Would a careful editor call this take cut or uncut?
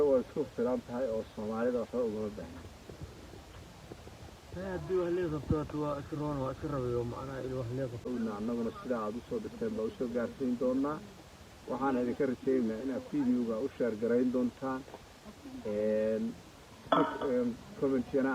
cut